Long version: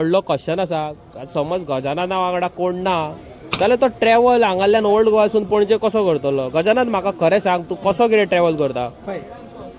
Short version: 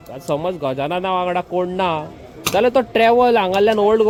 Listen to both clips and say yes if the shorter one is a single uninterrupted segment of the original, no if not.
yes